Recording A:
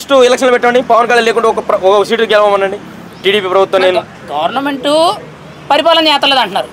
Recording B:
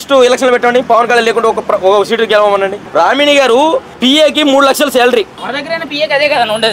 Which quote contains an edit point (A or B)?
B